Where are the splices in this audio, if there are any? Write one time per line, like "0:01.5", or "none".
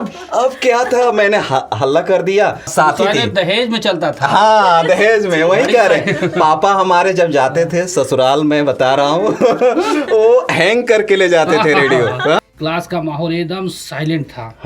0:02.6
0:12.4